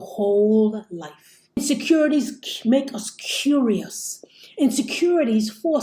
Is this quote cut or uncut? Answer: cut